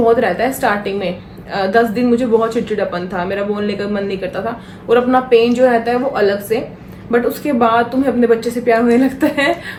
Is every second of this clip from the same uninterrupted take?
yes; 0 cuts

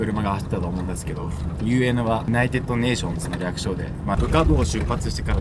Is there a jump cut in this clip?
yes; 1 cut; at 4.2 s

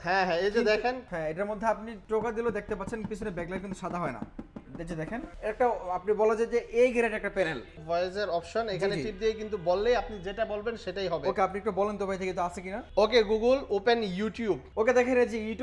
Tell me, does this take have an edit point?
yes; 6 cuts; at 1.0 s, 1.9 s, 5.3 s, 7.7 s, 12.7 s, 14.7 s

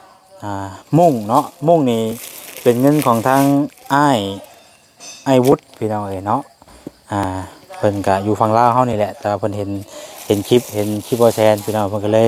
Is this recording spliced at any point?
no; 0 cuts

